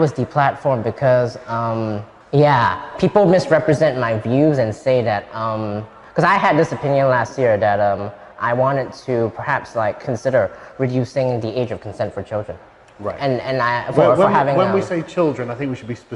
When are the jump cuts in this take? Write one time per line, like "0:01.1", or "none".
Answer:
0:02.1